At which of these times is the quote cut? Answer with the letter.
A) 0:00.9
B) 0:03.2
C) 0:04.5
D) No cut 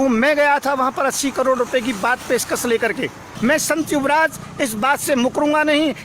B